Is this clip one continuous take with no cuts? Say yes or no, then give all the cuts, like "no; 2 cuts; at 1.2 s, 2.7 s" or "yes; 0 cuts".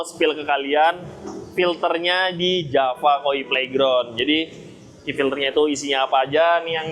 yes; 0 cuts